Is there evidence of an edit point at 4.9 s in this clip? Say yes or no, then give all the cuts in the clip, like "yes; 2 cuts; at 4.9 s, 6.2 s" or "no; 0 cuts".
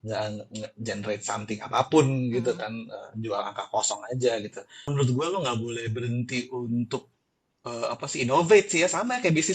yes; 1 cut; at 4.9 s